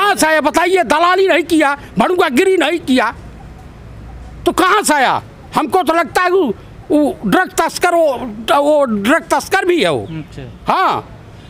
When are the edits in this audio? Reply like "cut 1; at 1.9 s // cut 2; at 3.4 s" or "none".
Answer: none